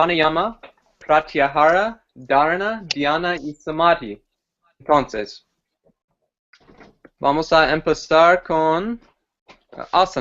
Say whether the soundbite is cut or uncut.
cut